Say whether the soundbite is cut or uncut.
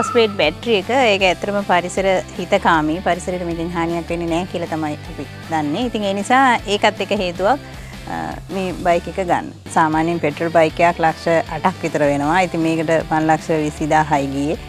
uncut